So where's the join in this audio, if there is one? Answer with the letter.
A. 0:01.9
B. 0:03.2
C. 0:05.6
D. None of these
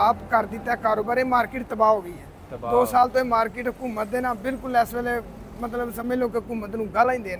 D